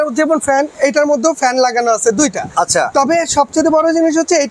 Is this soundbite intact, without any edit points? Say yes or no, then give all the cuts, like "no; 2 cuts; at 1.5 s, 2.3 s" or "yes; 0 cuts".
yes; 0 cuts